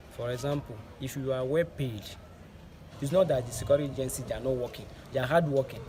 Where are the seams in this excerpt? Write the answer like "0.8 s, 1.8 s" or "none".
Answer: 2.9 s